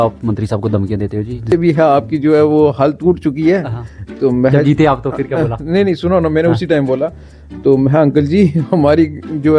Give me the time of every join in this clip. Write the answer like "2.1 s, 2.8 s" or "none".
1.5 s